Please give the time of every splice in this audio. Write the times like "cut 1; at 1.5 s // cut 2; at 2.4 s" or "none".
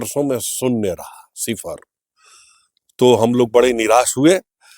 none